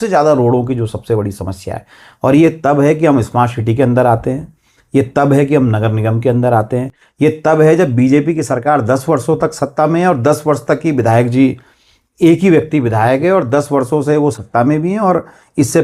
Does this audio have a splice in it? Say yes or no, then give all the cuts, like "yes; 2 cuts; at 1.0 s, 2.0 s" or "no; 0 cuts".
no; 0 cuts